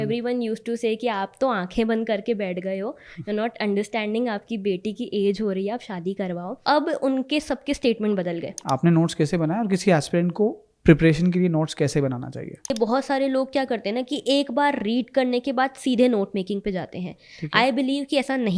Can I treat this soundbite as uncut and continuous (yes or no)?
no